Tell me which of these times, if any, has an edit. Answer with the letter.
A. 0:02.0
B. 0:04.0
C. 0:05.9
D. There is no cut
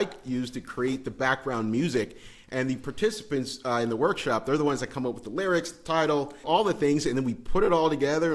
D